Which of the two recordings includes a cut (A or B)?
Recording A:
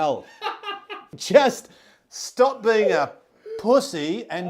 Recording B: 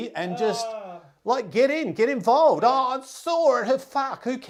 A